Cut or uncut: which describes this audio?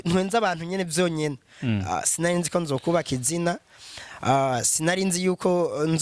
uncut